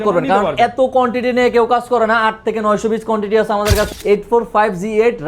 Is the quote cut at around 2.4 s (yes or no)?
no